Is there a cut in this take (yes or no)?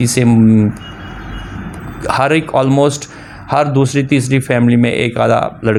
no